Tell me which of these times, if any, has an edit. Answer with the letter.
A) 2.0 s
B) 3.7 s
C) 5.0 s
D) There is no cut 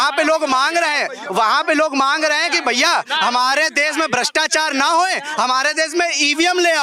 D